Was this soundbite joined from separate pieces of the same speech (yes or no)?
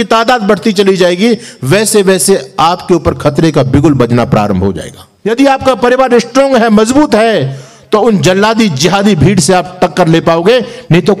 yes